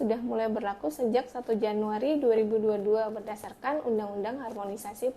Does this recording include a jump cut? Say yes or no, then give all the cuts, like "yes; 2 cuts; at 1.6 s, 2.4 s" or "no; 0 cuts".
no; 0 cuts